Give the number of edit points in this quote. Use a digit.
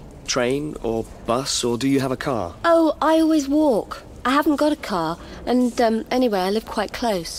0